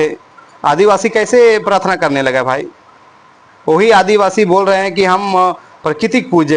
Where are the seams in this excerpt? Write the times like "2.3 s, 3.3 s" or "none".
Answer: none